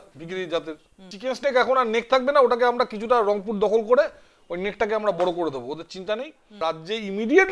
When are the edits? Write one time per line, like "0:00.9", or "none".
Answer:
0:01.1
0:06.6